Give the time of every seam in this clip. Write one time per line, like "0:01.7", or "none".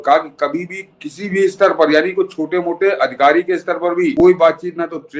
0:04.2